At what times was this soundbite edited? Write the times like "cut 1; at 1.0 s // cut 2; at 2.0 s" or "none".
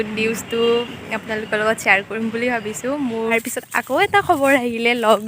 cut 1; at 3.3 s